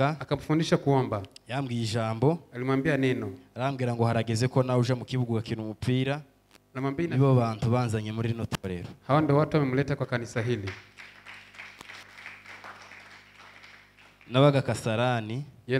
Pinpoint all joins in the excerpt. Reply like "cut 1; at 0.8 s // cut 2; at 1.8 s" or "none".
cut 1; at 7.1 s